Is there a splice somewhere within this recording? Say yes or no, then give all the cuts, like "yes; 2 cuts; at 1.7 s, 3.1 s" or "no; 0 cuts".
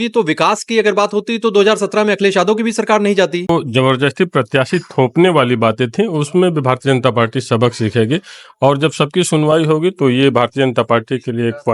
yes; 1 cut; at 3.5 s